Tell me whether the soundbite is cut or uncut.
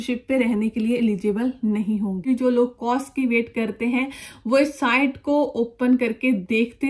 cut